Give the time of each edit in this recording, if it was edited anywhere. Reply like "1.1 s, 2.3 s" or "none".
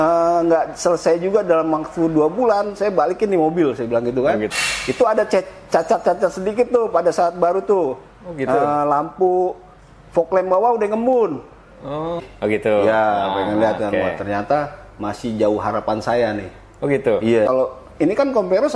4.5 s, 12.3 s, 17.5 s

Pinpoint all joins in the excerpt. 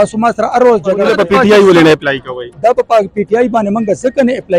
1.0 s

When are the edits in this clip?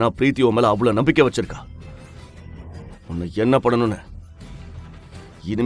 none

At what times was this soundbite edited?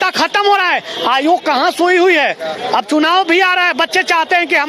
none

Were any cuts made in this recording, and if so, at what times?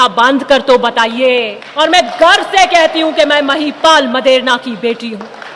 1.6 s

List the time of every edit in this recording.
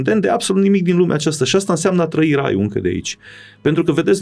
none

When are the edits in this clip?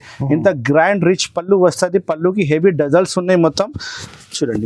none

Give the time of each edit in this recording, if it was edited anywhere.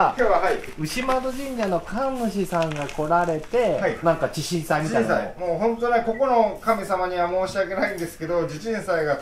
4.0 s

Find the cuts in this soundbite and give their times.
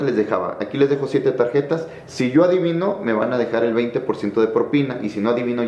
none

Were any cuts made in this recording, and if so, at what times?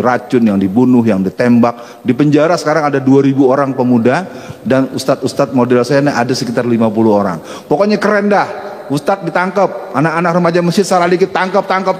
none

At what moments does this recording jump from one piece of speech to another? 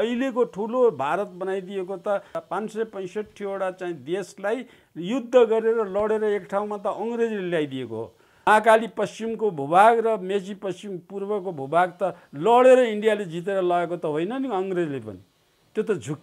8.3 s

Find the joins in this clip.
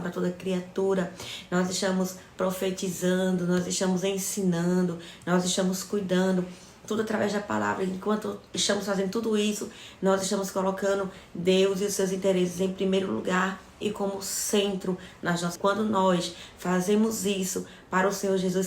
15.5 s

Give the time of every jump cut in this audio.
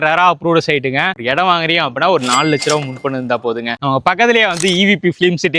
1.1 s, 3.8 s

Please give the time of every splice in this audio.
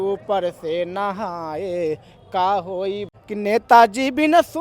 3.1 s

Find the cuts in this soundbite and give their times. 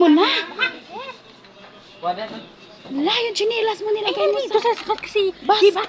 none

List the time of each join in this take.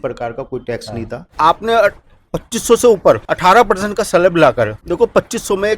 1.2 s, 3.3 s, 4.8 s

